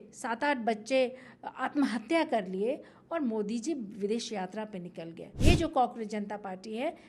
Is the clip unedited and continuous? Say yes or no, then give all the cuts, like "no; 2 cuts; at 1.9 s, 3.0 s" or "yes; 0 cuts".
no; 1 cut; at 5.3 s